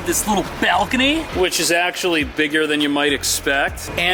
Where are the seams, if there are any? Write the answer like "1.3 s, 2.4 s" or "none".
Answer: none